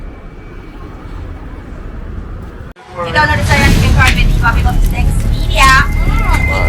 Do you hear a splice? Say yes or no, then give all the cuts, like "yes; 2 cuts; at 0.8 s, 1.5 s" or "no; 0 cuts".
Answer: yes; 1 cut; at 2.7 s